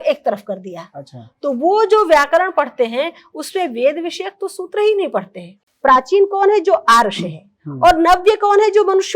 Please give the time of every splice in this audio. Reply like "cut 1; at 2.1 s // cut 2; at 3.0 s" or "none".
cut 1; at 5.6 s